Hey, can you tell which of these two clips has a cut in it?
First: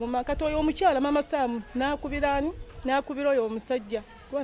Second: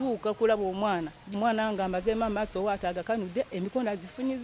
second; 1 cut; at 1.3 s

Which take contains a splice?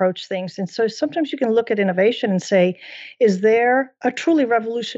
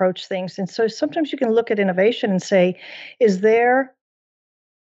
first; 1 cut; at 3.9 s

